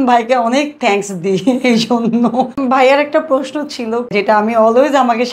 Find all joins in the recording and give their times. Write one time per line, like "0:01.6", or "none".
0:02.5
0:04.1

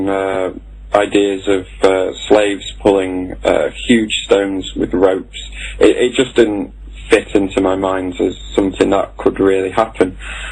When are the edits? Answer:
none

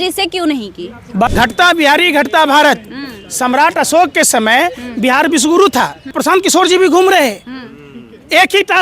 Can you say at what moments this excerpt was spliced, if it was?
0:01.3
0:06.2

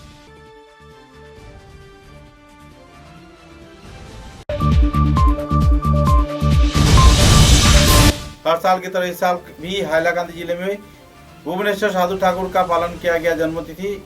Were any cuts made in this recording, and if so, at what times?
0:04.4
0:08.1

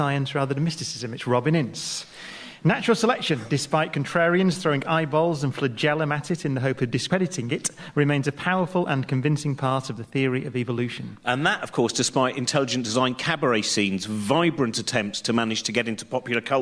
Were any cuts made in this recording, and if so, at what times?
0:11.1

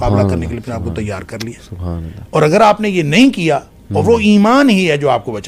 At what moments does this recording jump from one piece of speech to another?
none

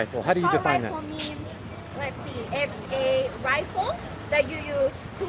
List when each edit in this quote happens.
none

